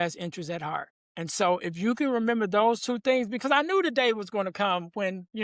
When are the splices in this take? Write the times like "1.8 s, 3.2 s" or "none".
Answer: 1.0 s